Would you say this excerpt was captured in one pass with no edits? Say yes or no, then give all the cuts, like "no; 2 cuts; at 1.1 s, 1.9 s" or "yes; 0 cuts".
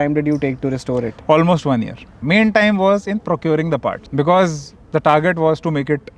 no; 2 cuts; at 2.1 s, 4.0 s